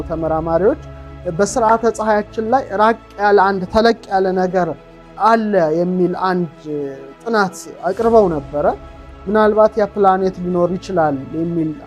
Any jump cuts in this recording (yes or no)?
no